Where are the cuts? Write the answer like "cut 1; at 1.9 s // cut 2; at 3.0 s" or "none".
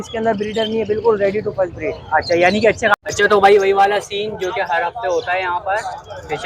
cut 1; at 2.9 s

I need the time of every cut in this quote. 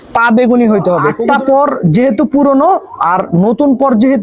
cut 1; at 1.1 s

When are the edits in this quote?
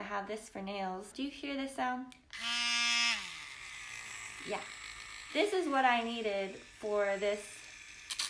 cut 1; at 1.1 s

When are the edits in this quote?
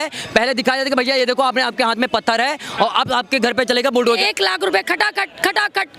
cut 1; at 4.1 s

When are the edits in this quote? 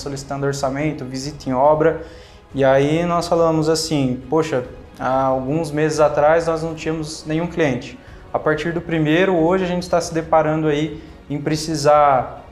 none

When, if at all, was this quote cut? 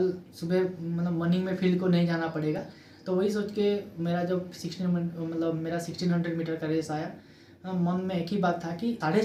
none

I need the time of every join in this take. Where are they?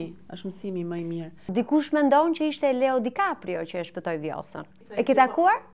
cut 1; at 1.5 s // cut 2; at 5.0 s

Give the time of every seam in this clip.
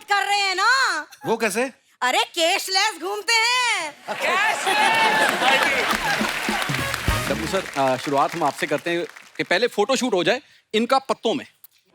cut 1; at 7.2 s

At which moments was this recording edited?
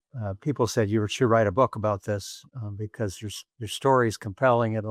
none

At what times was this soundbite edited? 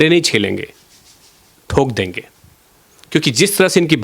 none

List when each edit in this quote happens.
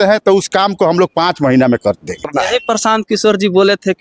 cut 1; at 2.3 s

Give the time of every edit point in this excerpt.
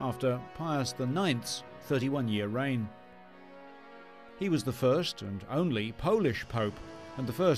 cut 1; at 5.4 s

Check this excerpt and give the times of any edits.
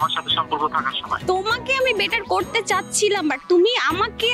none

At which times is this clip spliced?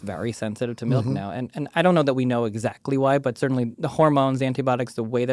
none

